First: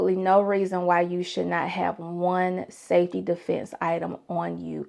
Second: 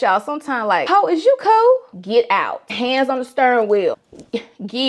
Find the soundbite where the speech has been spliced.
second; 1 cut; at 2.0 s

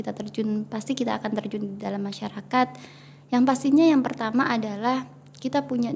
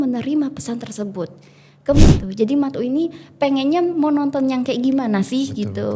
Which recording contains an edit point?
second; 1 cut; at 2.1 s

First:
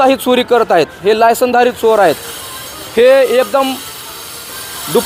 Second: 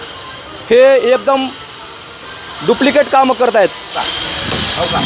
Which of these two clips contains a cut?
second; 1 cut; at 4.0 s

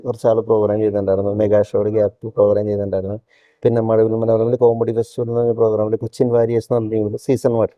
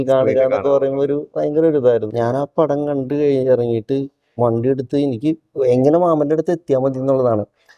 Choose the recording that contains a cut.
second; 1 cut; at 2.1 s

